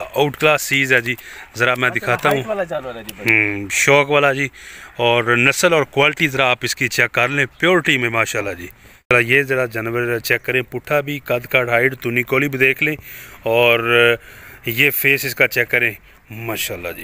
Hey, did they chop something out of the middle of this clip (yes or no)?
yes